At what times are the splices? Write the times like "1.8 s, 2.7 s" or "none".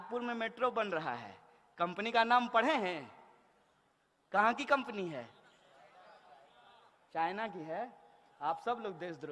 none